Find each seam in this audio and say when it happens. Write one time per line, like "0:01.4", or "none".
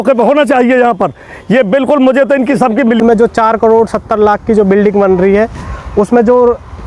0:03.0